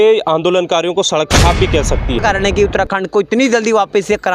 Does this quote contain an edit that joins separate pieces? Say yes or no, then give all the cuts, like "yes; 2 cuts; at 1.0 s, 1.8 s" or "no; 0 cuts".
yes; 1 cut; at 2.2 s